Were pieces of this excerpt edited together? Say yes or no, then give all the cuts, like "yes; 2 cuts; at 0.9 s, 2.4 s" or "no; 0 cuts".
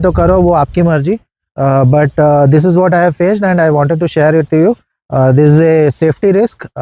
no; 0 cuts